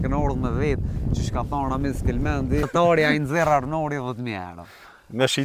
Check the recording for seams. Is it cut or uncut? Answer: cut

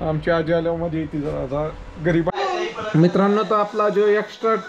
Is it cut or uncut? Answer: cut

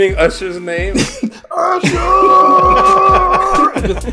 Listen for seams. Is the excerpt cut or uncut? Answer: uncut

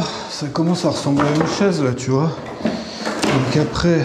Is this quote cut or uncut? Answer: uncut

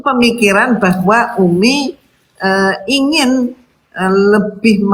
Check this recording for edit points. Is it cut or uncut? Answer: uncut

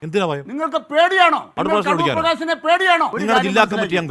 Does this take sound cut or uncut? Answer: cut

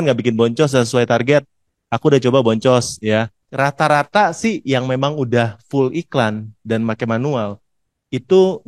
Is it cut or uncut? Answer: cut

